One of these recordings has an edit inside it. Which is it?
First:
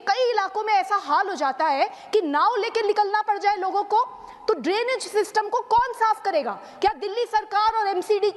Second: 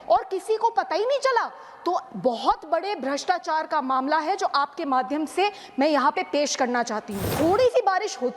second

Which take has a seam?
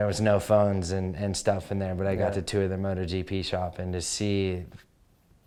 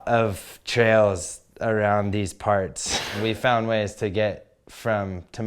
second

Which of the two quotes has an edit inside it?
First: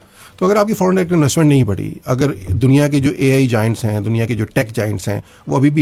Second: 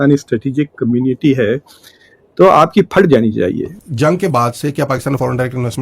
second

